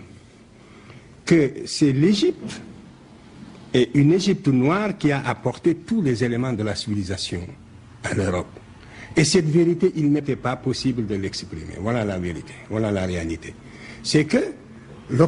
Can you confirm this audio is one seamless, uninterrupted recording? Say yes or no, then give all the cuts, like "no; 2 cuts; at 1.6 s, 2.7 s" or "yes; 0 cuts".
yes; 0 cuts